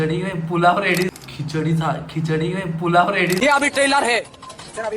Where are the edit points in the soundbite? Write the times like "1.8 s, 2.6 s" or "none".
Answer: 1.0 s, 3.3 s